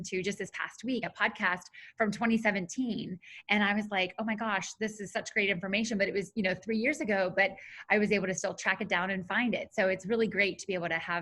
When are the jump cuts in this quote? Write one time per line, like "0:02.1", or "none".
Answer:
0:01.1

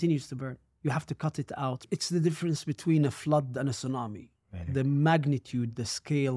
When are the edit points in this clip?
0:01.9

